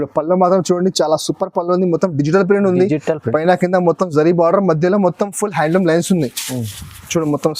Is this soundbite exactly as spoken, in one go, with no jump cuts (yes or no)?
yes